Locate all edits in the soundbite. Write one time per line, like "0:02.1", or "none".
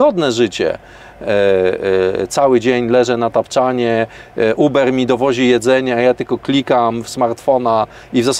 none